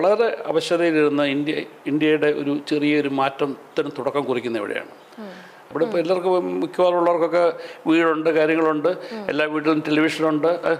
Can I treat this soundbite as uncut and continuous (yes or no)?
no